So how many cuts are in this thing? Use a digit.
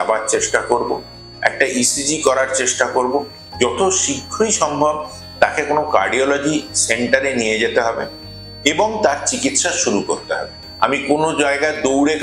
2